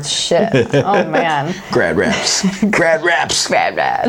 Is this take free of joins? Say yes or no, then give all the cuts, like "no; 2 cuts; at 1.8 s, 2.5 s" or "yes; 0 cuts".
yes; 0 cuts